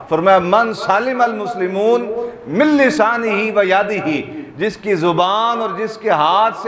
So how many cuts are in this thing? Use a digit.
0